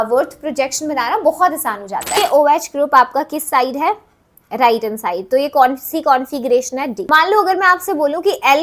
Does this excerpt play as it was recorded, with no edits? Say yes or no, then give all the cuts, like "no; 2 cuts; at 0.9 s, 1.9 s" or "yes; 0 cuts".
no; 2 cuts; at 2.2 s, 7.0 s